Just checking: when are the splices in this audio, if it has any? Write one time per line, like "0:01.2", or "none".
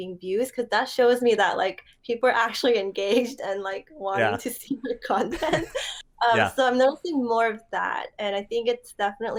none